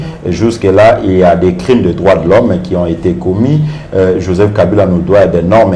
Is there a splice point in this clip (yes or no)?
no